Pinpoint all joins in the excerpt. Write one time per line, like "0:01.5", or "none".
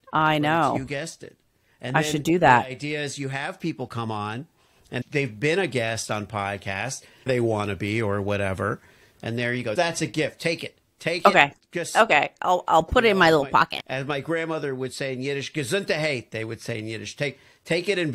0:07.3
0:09.7